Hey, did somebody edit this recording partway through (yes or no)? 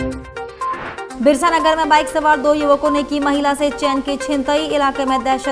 yes